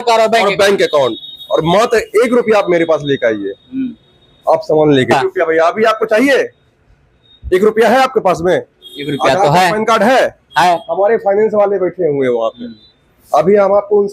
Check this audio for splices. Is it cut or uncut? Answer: cut